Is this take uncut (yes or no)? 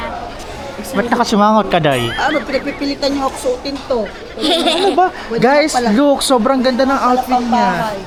yes